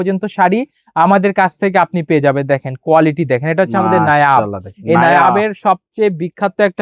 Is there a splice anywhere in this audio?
no; 0 cuts

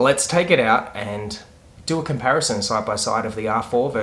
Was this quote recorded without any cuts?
yes; 0 cuts

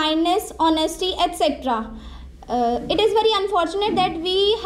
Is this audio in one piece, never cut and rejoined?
yes; 0 cuts

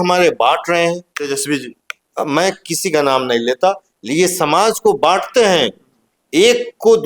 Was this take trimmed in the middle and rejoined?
no; 0 cuts

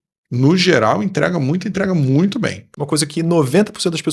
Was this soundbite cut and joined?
yes; 1 cut; at 2.6 s

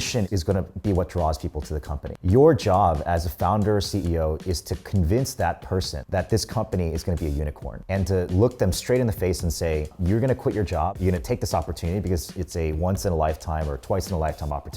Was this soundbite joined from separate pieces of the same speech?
yes; 1 cut; at 2.1 s

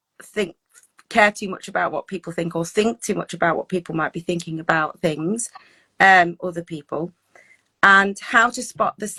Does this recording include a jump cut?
no; 0 cuts

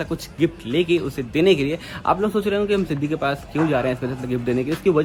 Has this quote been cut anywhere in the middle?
no; 0 cuts

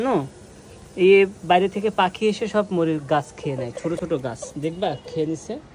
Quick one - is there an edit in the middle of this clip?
no; 0 cuts

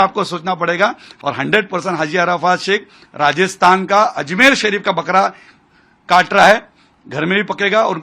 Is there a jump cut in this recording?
yes; 1 cut; at 1.1 s

